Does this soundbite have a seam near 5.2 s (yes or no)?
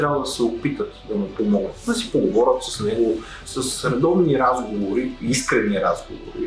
no